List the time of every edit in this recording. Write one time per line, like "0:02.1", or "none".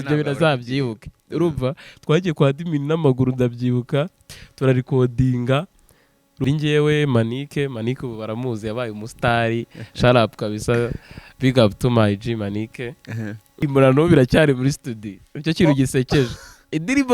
0:06.4
0:13.6